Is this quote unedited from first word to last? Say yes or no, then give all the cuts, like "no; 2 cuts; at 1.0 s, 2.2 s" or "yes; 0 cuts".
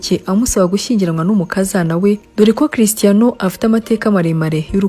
yes; 0 cuts